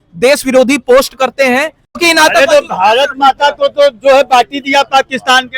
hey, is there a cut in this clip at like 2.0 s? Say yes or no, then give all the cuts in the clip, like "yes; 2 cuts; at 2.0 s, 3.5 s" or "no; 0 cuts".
yes; 1 cut; at 2.0 s